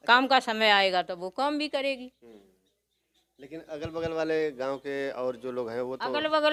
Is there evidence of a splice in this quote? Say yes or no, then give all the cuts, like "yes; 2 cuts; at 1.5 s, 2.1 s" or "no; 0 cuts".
no; 0 cuts